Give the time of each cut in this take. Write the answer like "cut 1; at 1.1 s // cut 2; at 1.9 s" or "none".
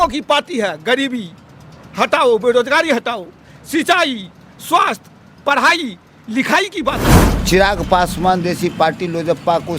cut 1; at 7.2 s